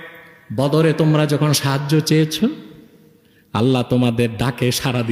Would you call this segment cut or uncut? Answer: uncut